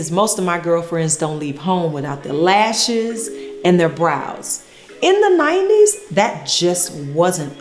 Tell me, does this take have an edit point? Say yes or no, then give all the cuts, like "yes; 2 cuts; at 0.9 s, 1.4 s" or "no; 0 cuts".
no; 0 cuts